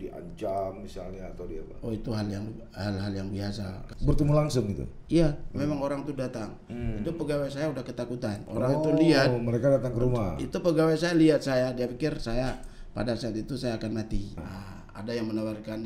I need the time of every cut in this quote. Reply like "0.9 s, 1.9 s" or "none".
3.8 s, 8.4 s, 14.4 s